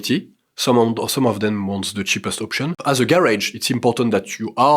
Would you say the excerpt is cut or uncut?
cut